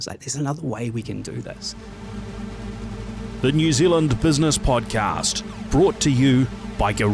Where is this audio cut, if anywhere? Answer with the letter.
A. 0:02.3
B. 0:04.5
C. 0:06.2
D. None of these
A